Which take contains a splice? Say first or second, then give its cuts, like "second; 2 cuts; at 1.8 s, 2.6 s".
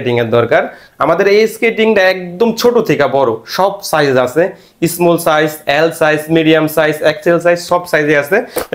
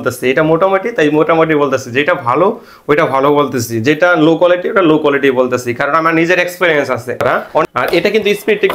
second; 1 cut; at 7.4 s